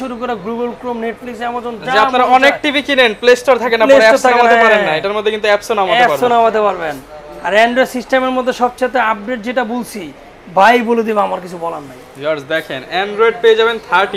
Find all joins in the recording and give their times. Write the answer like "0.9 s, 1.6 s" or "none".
none